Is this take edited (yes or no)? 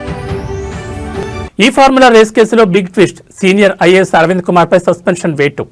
yes